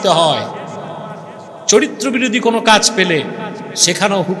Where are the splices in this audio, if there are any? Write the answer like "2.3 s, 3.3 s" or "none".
none